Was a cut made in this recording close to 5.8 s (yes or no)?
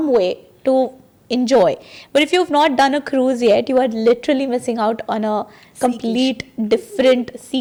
no